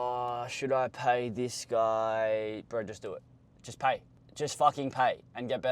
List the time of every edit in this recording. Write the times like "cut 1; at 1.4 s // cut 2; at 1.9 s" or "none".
cut 1; at 4.2 s